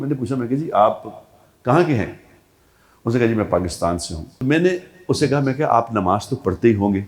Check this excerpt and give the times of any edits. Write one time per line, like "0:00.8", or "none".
0:04.3